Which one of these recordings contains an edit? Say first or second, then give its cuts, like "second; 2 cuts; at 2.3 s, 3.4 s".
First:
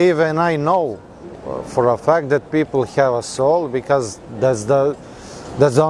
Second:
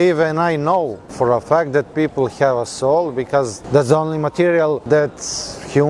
second; 3 cuts; at 1.0 s, 3.6 s, 4.8 s